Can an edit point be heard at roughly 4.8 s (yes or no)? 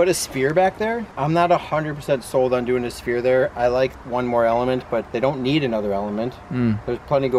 no